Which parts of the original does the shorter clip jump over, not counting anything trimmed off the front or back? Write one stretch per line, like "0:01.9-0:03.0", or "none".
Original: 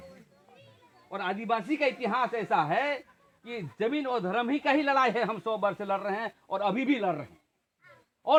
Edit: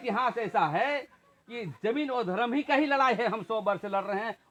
none